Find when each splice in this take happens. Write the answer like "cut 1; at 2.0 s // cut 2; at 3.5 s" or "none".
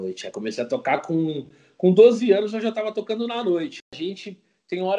cut 1; at 3.9 s